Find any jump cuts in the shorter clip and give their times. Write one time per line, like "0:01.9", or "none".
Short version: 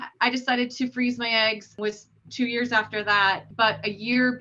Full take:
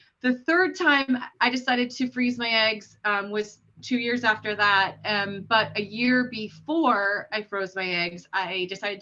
0:01.7
0:03.5